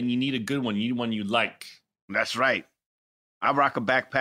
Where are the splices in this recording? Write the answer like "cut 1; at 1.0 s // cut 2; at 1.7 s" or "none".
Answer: none